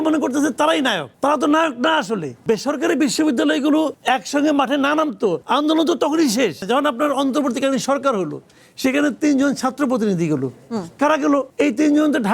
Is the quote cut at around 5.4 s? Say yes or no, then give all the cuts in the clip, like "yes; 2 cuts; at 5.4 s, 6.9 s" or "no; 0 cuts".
yes; 4 cuts; at 1.1 s, 2.4 s, 5.4 s, 6.6 s